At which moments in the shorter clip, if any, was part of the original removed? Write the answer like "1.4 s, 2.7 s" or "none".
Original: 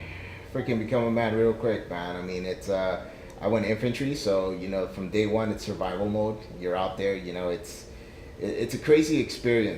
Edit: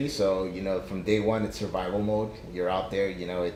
none